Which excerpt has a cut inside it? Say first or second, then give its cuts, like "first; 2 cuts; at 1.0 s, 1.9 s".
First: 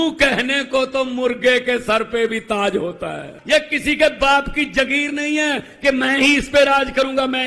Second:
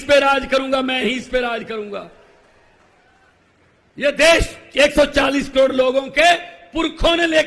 first; 1 cut; at 3.3 s